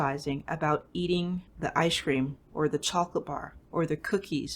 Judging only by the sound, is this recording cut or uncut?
cut